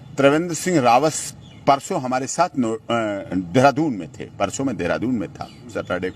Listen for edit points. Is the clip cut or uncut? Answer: uncut